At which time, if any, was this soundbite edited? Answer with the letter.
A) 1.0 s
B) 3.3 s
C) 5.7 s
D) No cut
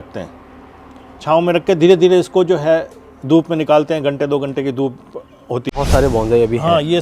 C